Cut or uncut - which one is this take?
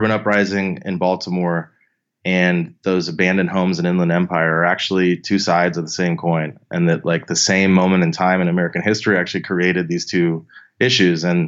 uncut